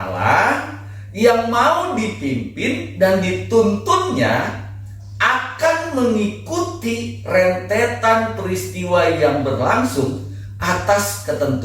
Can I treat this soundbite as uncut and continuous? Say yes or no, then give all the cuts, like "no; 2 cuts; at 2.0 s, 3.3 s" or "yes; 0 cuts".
yes; 0 cuts